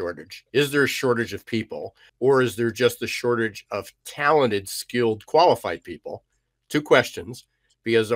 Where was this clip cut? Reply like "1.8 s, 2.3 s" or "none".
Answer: 2.1 s